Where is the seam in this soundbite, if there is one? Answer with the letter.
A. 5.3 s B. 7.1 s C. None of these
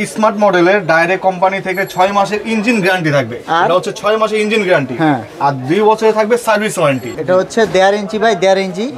B